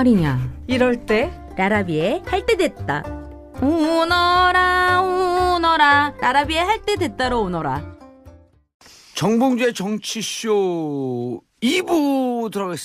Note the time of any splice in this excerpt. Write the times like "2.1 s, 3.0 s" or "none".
9.2 s